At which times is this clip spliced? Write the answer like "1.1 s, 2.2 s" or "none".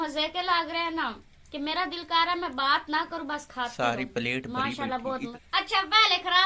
5.3 s